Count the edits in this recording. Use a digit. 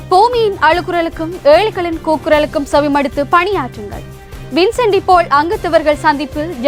0